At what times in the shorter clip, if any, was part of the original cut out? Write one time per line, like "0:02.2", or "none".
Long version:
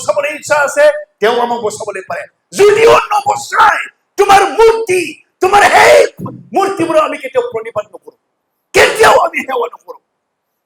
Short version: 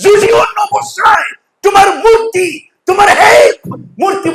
none